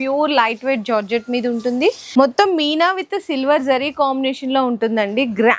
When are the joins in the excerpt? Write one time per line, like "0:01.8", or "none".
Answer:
0:02.0

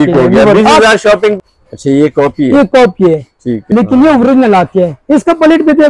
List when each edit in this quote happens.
0:01.4
0:03.5

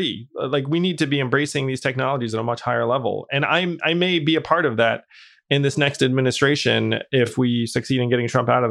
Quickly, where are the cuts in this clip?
0:07.3

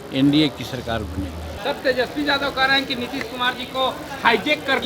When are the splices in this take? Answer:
0:01.5

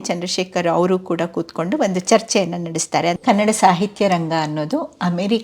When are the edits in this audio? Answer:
0:03.2

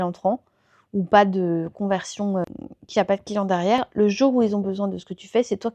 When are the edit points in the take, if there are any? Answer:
0:03.9

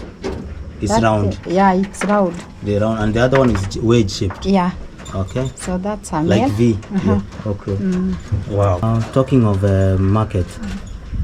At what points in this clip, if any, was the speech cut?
0:08.8

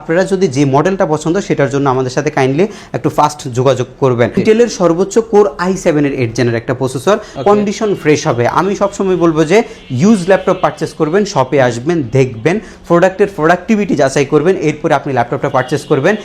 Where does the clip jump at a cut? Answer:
0:04.4
0:07.3

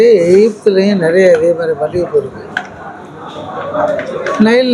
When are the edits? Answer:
none

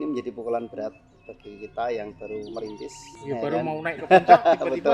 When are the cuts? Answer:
0:03.2

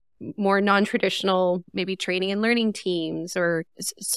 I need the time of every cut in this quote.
0:01.7

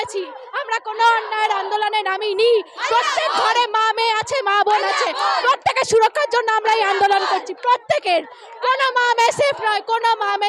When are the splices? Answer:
none

